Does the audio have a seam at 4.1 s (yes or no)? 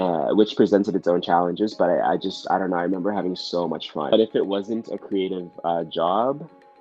yes